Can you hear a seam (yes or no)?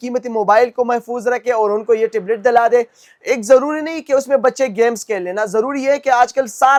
no